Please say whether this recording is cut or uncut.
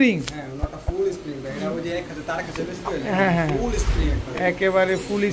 uncut